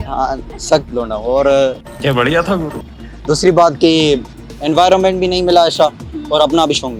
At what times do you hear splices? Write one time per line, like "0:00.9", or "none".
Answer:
none